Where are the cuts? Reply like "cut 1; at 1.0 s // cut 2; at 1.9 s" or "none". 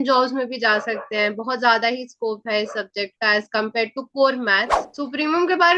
cut 1; at 4.8 s